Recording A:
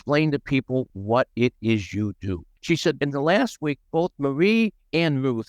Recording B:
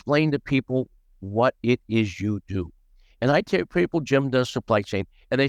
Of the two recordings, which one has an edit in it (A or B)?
A